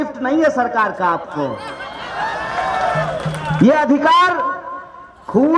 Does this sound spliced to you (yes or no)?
no